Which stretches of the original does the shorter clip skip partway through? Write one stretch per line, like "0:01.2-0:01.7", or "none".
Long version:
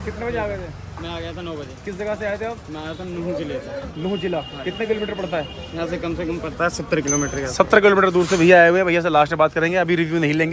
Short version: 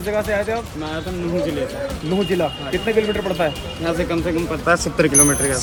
none